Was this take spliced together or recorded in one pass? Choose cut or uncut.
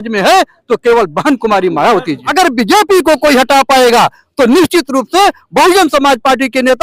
cut